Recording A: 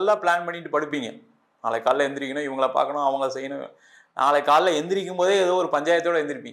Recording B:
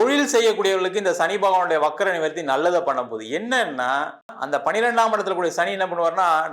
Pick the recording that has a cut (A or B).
B